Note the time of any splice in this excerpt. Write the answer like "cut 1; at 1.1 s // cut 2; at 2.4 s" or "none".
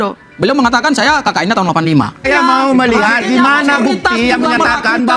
cut 1; at 2.2 s